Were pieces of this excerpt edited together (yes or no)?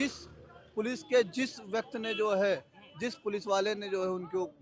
no